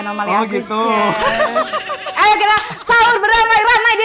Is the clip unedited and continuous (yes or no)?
no